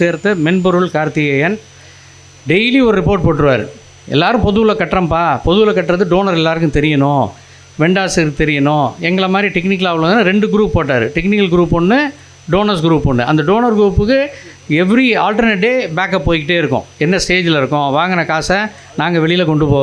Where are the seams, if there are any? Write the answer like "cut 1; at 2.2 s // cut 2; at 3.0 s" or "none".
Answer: none